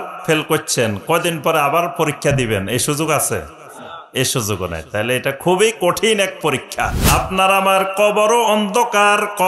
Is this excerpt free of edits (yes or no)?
no